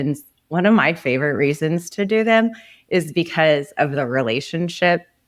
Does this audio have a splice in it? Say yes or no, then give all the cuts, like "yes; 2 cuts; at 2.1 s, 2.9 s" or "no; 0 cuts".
no; 0 cuts